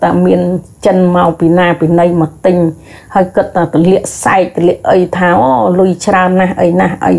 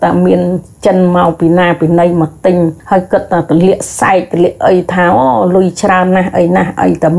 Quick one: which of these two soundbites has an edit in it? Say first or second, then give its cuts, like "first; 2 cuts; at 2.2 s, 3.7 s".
second; 1 cut; at 2.8 s